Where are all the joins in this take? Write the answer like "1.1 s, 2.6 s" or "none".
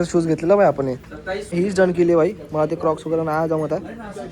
1.5 s